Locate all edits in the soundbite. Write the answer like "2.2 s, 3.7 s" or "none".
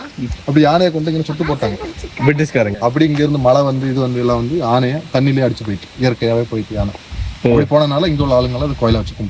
2.7 s